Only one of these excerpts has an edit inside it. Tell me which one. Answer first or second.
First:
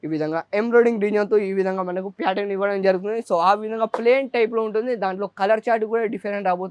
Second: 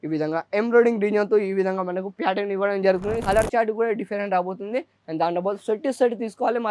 second